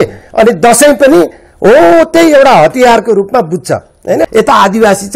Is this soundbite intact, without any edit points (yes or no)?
no